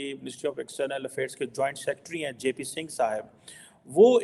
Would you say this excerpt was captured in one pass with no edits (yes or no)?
yes